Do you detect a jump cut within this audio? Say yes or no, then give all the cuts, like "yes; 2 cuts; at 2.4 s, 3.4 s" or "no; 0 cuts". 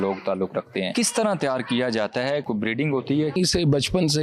yes; 3 cuts; at 0.9 s, 2.4 s, 3.4 s